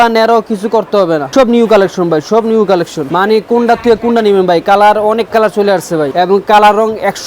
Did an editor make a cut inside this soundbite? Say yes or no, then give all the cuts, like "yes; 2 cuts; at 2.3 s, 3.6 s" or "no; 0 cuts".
yes; 3 cuts; at 1.3 s, 3.0 s, 6.1 s